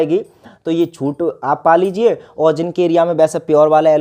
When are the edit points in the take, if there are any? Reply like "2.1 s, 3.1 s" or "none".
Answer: none